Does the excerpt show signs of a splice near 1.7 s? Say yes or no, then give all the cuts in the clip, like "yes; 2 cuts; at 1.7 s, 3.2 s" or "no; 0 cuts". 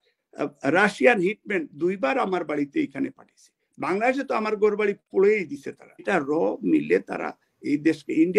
no; 1 cut; at 6.0 s